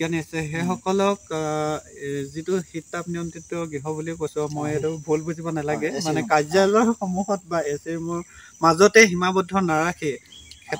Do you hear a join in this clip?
no; 0 cuts

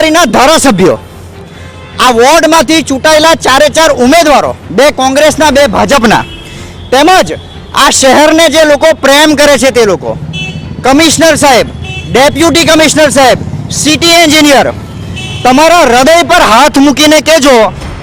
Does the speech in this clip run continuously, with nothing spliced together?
yes; 0 cuts

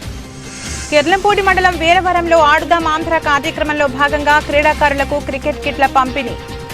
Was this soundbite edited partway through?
no; 0 cuts

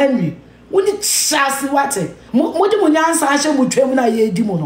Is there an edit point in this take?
yes; 1 cut; at 2.2 s

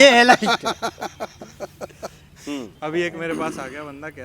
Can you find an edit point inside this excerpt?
yes; 1 cut; at 2.7 s

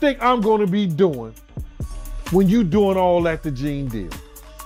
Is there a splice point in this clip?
no; 0 cuts

